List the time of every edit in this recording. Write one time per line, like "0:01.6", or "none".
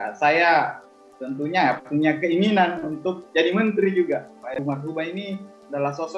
0:04.6